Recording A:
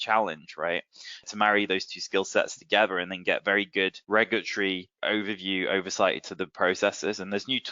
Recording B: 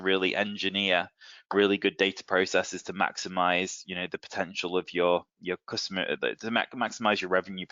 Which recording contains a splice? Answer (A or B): A